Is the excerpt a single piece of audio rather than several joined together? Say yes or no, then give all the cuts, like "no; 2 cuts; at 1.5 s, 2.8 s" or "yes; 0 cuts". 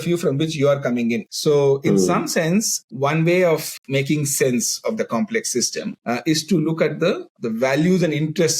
no; 4 cuts; at 1.3 s, 2.8 s, 5.9 s, 7.3 s